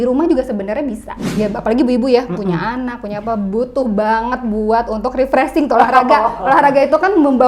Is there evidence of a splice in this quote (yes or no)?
yes